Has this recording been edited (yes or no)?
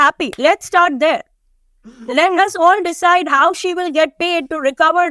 no